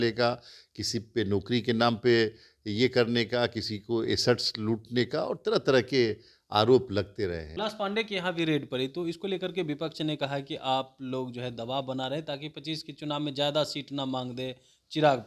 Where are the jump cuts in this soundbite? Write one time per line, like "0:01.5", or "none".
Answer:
0:07.5